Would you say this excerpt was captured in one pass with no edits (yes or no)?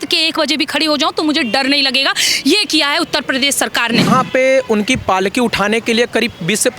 no